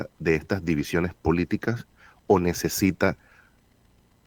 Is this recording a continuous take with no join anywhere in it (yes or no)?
yes